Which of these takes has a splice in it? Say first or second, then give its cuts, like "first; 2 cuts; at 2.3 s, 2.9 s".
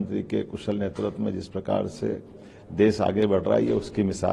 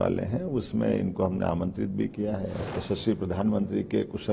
second; 1 cut; at 2.6 s